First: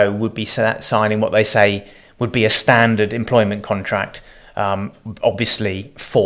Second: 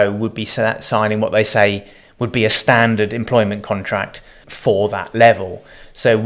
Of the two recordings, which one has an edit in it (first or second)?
second